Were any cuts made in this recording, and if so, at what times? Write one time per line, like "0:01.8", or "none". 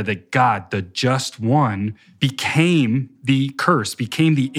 0:02.0